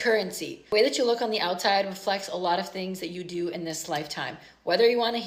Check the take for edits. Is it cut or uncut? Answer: uncut